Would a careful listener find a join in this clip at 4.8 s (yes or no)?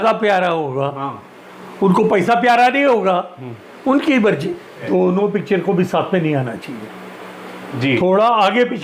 yes